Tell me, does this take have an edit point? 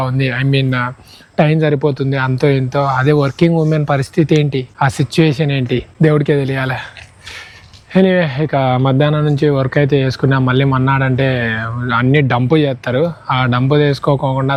no; 0 cuts

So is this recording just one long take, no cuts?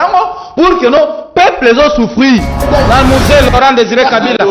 no; 1 cut; at 2.6 s

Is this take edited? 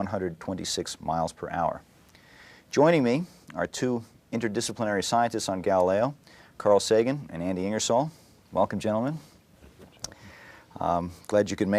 yes; 1 cut; at 8.2 s

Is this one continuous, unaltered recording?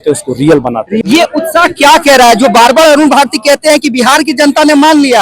no; 1 cut; at 0.9 s

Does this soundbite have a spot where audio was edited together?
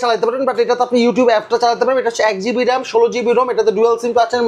no; 0 cuts

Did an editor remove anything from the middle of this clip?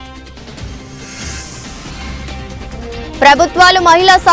no; 0 cuts

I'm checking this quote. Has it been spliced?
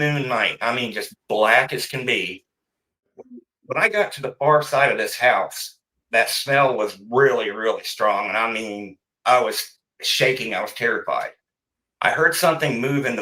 yes; 1 cut; at 3.1 s

